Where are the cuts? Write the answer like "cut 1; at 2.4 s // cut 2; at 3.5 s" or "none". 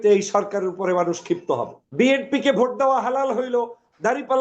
cut 1; at 1.8 s